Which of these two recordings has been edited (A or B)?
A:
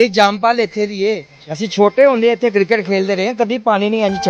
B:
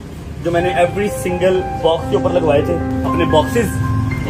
B